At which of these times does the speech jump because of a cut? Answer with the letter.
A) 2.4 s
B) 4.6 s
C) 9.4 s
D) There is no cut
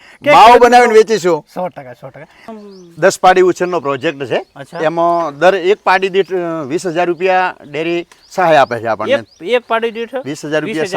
A